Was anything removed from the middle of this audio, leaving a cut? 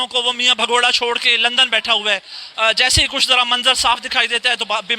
yes; 1 cut; at 1.2 s

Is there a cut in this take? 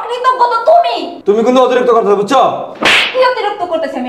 no; 0 cuts

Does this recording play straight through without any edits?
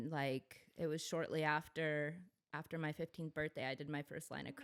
yes; 0 cuts

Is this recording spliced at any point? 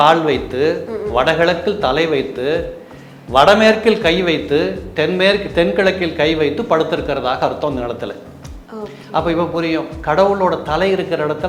no; 0 cuts

